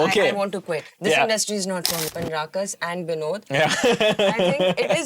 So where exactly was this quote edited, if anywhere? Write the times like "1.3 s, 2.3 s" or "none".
2.0 s